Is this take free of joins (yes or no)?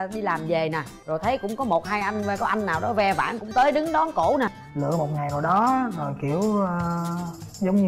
no